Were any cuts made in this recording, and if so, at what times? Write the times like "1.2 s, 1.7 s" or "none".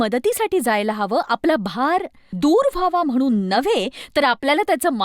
2.2 s